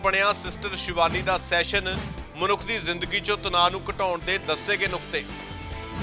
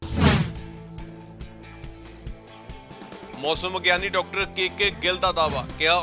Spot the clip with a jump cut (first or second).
second